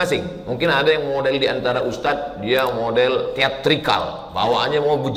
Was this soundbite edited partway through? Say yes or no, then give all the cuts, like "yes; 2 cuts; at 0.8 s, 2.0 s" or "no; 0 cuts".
no; 0 cuts